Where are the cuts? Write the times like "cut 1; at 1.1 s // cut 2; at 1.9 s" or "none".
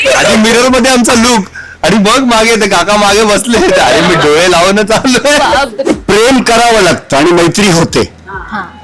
cut 1; at 5.8 s

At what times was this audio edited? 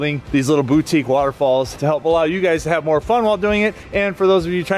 none

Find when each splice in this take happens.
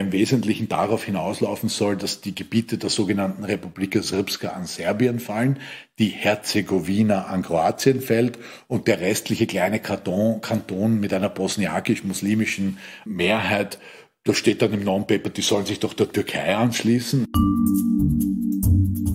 none

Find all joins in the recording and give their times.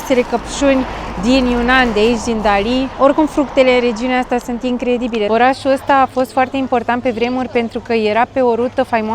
cut 1; at 2.9 s // cut 2; at 5.3 s

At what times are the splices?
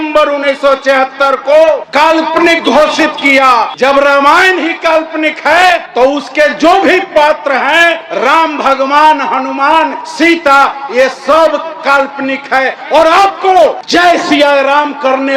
cut 1; at 2.0 s // cut 2; at 3.7 s // cut 3; at 5.9 s // cut 4; at 7.7 s // cut 5; at 10.1 s // cut 6; at 13.6 s

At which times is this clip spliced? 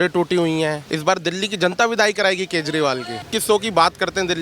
cut 1; at 0.9 s // cut 2; at 3.3 s

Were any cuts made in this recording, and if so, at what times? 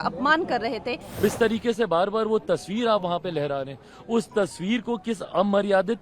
cut 1; at 1.2 s

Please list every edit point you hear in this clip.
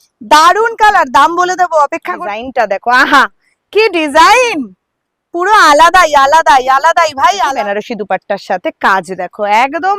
cut 1; at 2.2 s // cut 2; at 7.5 s

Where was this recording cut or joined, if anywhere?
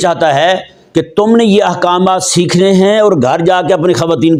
none

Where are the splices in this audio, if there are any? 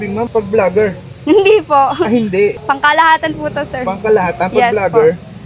none

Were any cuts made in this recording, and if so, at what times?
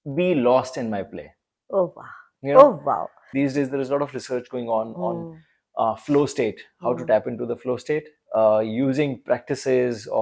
cut 1; at 3.1 s

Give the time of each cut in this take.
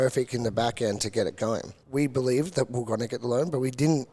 cut 1; at 1.7 s

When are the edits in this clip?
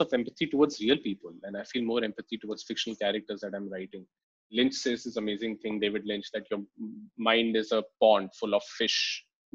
cut 1; at 4.5 s

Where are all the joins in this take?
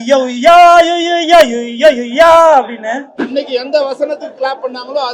cut 1; at 3.2 s

